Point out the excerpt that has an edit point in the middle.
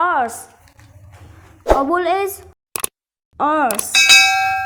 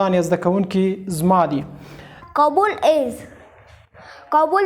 second; 1 cut; at 2.2 s

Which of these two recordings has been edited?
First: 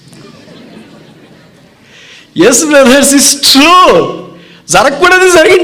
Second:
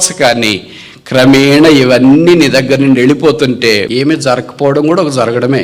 second; 1 cut; at 3.9 s

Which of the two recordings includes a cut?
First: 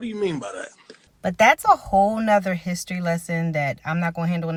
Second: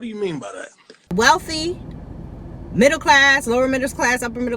second; 1 cut; at 1.1 s

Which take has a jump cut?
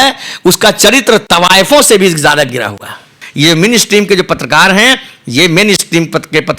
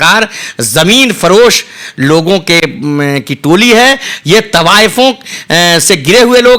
first; 1 cut; at 3.2 s

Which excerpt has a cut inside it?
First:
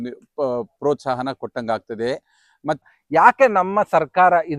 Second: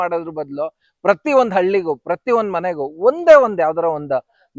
first; 1 cut; at 2.8 s

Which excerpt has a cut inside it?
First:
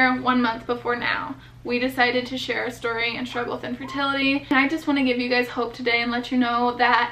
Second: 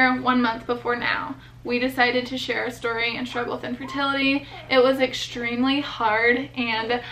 first; 1 cut; at 4.5 s

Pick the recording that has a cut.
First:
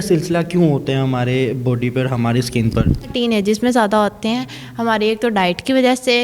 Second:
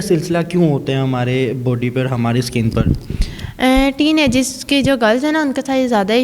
first; 1 cut; at 3.1 s

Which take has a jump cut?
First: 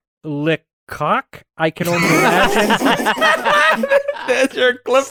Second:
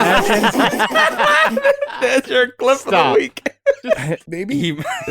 second; 1 cut; at 4.2 s

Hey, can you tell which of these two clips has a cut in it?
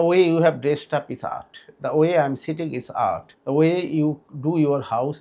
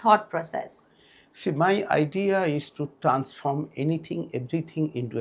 first; 1 cut; at 3.3 s

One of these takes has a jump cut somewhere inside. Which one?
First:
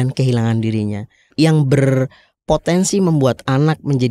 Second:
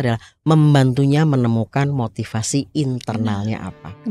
first; 1 cut; at 1.3 s

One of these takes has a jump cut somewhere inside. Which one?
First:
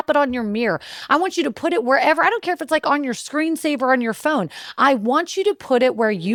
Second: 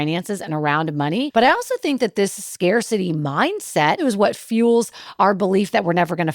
second; 2 cuts; at 1.3 s, 4.0 s

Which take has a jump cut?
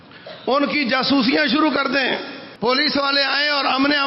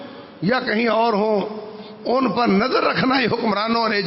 first; 1 cut; at 2.4 s

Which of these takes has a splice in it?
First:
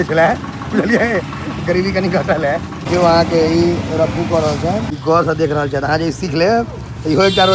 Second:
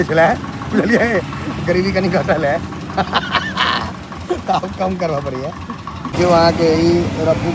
first; 2 cuts; at 2.7 s, 4.9 s

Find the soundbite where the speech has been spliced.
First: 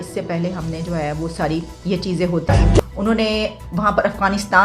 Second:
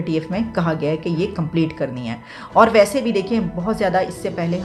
first; 1 cut; at 2.5 s

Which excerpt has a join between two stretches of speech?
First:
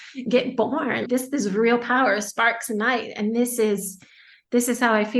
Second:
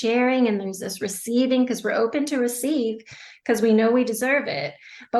first; 1 cut; at 1.0 s

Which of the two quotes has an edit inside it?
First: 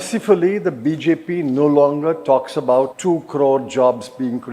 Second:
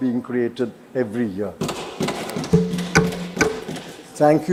first; 1 cut; at 2.9 s

